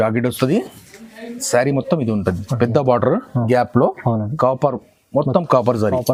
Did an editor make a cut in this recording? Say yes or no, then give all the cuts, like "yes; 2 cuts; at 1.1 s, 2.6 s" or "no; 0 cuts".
no; 0 cuts